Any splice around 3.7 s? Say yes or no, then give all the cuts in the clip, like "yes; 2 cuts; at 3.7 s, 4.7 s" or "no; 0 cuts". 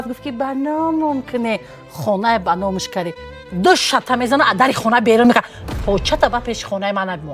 no; 0 cuts